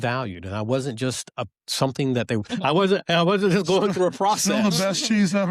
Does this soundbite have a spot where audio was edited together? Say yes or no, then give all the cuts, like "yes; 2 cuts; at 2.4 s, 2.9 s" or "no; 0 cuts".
yes; 1 cut; at 2.5 s